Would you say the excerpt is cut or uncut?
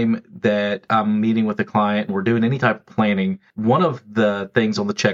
cut